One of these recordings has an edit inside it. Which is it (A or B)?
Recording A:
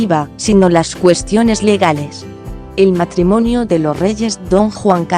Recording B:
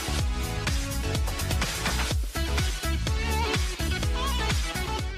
A